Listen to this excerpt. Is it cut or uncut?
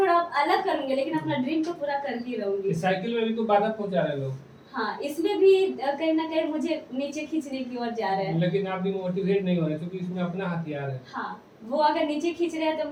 uncut